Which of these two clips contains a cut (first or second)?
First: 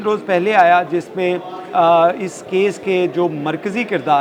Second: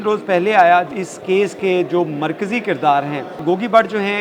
second